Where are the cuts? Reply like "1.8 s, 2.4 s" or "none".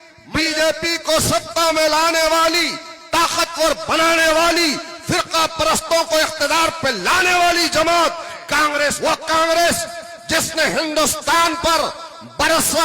9.0 s